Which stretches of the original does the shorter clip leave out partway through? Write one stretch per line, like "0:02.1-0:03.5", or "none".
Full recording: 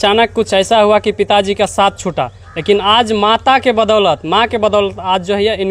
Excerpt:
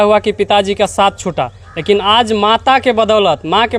none

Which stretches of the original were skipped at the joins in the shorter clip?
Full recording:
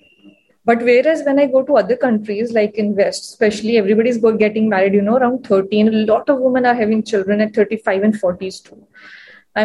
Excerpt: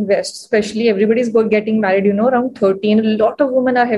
none

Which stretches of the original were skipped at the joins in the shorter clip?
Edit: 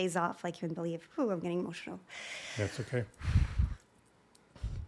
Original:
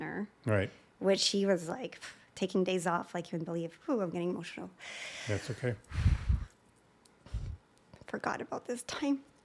none

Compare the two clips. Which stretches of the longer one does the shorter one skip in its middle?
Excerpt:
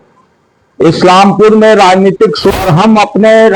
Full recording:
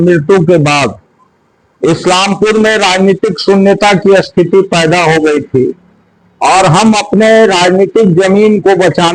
0:03.5-0:06.5

